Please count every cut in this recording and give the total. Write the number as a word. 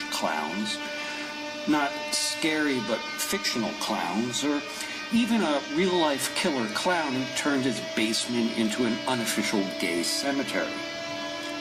one